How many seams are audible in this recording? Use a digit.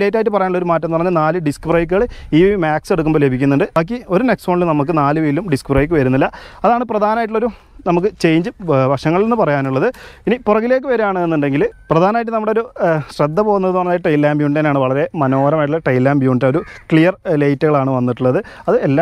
0